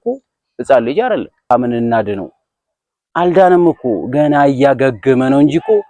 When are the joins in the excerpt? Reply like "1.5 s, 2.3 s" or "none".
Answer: 1.5 s